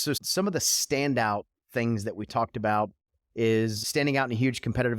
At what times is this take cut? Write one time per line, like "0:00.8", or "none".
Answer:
0:03.8